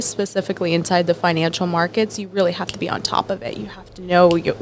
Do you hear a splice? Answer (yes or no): no